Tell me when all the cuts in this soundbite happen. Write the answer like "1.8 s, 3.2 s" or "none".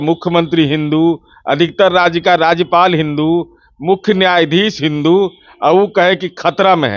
none